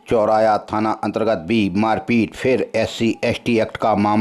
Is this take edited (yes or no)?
no